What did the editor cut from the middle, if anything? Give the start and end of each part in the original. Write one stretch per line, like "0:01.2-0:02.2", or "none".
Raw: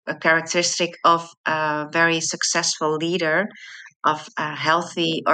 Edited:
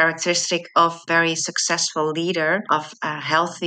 0:01.3-0:01.9
0:03.5-0:04.0